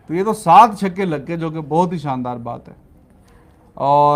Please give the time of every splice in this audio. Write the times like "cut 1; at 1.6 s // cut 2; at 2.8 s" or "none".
none